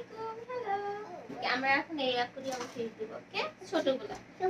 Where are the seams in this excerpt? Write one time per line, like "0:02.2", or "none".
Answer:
0:01.4

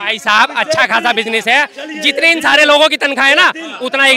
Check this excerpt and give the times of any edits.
none

